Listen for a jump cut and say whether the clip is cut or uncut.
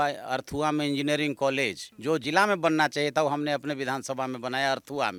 uncut